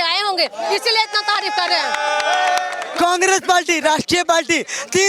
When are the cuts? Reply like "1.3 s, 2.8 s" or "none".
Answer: 2.8 s

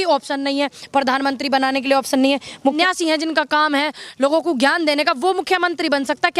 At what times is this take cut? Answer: 2.8 s

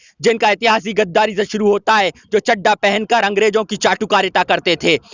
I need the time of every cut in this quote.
none

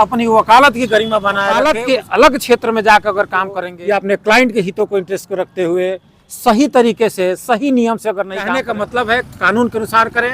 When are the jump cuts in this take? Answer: 1.6 s, 3.7 s, 8.7 s

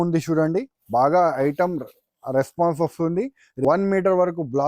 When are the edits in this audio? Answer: 3.4 s

